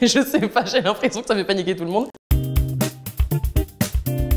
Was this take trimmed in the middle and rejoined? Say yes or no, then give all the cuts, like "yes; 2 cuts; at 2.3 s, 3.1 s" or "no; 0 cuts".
yes; 1 cut; at 2.2 s